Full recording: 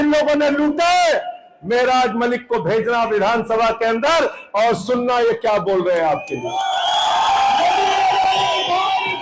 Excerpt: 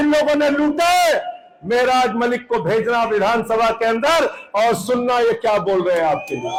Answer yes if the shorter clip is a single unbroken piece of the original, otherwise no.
yes